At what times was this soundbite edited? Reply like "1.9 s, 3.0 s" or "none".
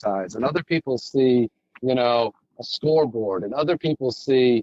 none